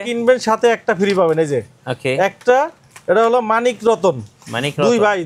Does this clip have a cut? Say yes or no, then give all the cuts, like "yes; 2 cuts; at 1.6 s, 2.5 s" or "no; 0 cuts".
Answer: no; 0 cuts